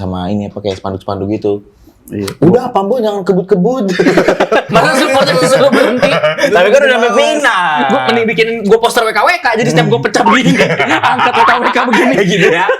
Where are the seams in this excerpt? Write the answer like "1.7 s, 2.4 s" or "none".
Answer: 4.7 s

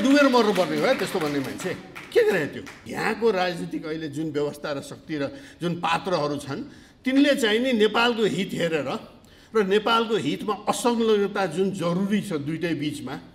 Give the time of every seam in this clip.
2.9 s

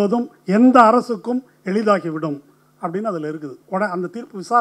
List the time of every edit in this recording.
3.5 s

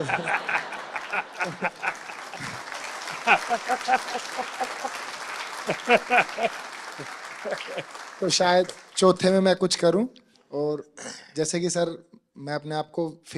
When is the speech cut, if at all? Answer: none

